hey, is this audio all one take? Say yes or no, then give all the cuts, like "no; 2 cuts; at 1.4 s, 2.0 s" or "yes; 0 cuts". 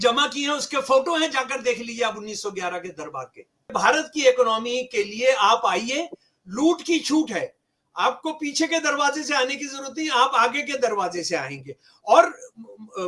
no; 1 cut; at 3.7 s